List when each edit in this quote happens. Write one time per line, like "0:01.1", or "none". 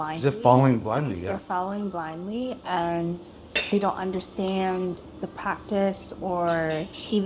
none